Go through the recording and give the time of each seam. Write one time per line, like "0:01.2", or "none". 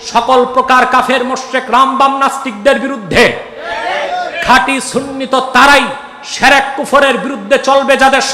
none